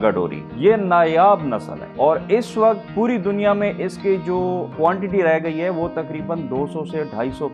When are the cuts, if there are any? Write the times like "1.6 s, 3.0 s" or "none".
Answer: none